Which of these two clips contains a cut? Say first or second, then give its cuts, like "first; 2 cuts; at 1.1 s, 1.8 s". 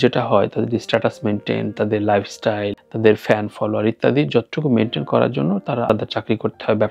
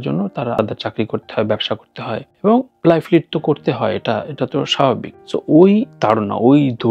second; 1 cut; at 5.1 s